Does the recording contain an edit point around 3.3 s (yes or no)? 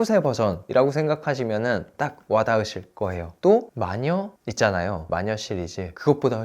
yes